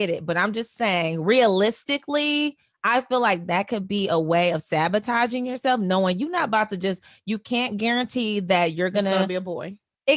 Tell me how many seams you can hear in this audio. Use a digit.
0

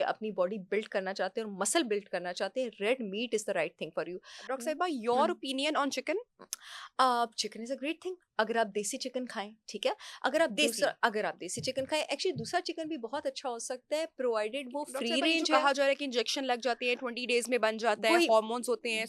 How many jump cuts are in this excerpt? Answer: 0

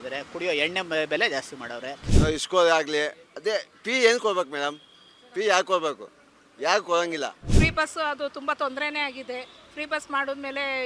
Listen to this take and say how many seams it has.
2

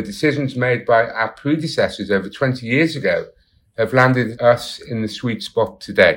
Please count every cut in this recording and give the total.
1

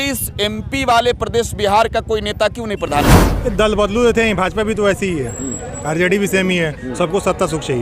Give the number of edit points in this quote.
1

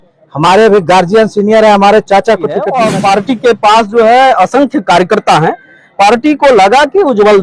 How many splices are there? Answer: 1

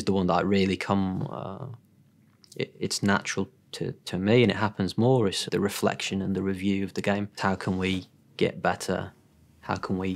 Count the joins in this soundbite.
2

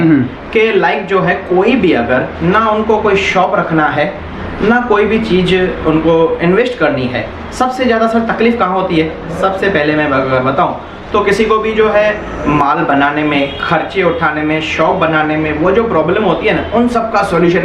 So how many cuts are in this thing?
0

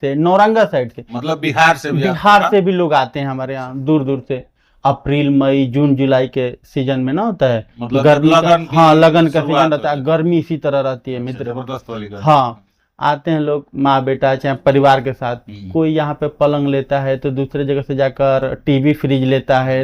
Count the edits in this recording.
0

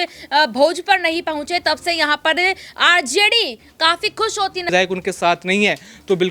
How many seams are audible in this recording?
1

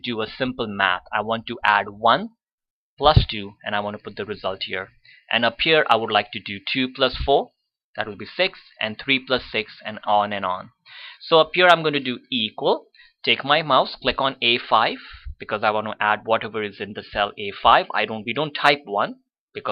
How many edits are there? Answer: 0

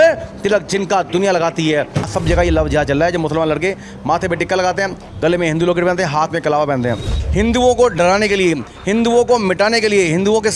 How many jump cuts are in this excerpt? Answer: 2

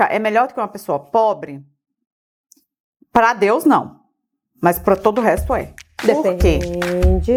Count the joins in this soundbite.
0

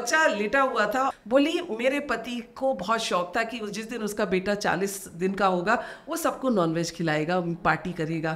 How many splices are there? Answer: 1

